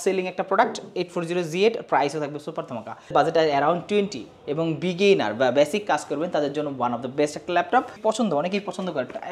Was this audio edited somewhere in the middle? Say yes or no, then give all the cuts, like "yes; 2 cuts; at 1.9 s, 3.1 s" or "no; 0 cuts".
yes; 2 cuts; at 3.1 s, 7.9 s